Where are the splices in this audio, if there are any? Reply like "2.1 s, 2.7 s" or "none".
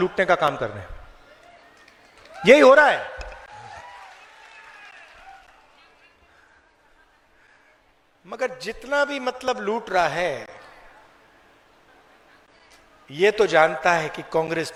none